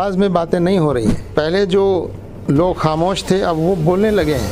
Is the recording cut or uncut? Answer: cut